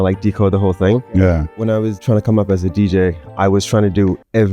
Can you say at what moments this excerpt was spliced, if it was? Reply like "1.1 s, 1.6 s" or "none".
1.7 s

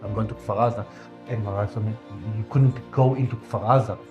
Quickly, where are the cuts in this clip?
2.1 s

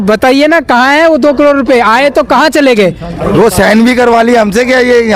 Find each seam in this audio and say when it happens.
3.3 s

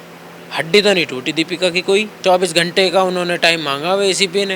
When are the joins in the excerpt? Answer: 2.1 s

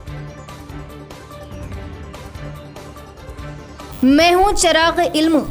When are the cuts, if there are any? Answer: 2.5 s

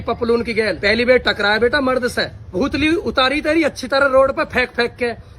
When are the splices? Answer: 2.5 s

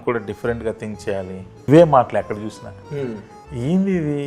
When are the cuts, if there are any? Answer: 1.7 s

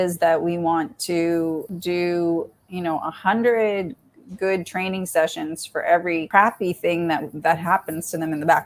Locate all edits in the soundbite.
1.7 s, 6.3 s

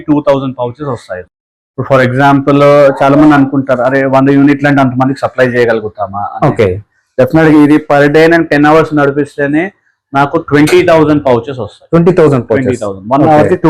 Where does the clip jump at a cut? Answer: none

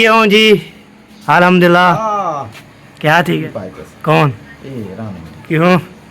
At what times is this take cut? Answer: 3.4 s

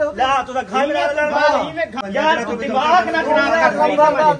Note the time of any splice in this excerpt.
2.0 s

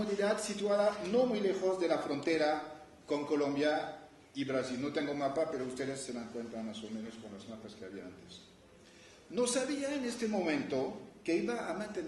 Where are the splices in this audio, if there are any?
6.3 s

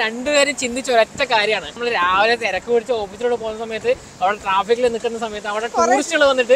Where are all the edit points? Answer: 1.7 s

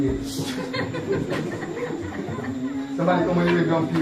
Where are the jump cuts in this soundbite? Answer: 2.4 s

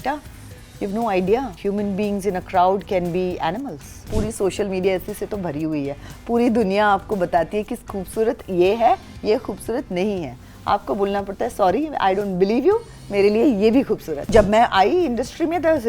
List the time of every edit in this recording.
1.5 s, 4.1 s, 14.3 s

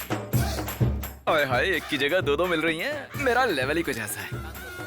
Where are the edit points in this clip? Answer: none

